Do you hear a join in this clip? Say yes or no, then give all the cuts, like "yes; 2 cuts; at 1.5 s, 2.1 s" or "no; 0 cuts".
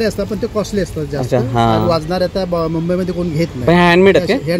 no; 0 cuts